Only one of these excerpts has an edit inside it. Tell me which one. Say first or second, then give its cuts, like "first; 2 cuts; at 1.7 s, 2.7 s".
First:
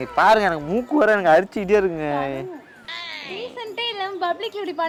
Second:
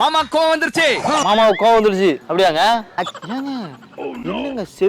second; 2 cuts; at 1.2 s, 2.8 s